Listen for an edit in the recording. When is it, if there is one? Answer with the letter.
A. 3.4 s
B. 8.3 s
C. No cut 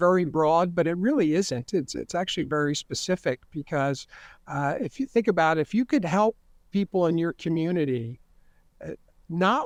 C